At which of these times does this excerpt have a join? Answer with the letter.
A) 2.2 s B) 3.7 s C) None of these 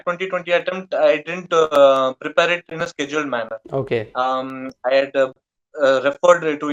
C